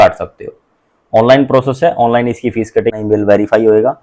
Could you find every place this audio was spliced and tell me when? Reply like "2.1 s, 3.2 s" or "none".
2.9 s

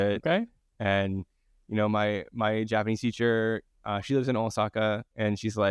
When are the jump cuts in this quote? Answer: none

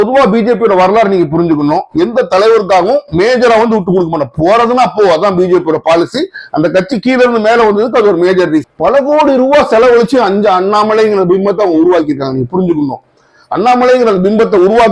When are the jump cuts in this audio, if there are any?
8.7 s

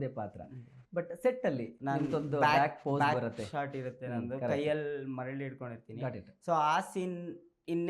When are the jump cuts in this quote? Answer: 1.7 s

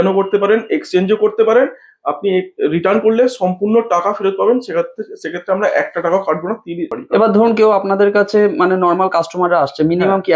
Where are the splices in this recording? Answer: 6.9 s

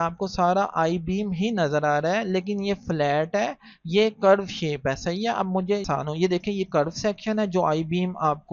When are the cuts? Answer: 5.9 s

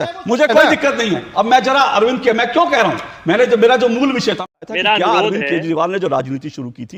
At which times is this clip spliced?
4.4 s

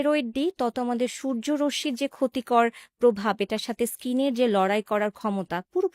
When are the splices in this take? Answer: none

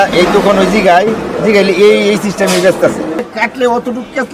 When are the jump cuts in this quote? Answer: 3.3 s

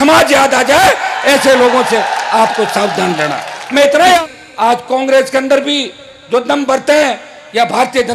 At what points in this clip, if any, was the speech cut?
4.2 s

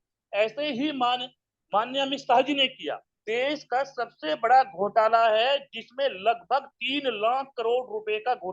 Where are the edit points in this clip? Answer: 3.1 s

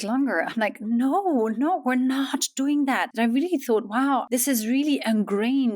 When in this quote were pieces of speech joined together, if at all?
3.1 s, 4.3 s

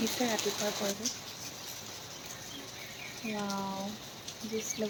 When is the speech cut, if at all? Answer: none

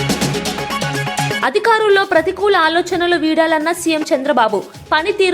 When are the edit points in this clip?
1.4 s

